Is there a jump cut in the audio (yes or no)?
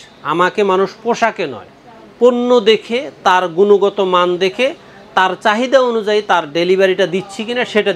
no